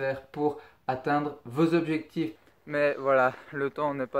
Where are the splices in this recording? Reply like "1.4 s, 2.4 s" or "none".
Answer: 2.5 s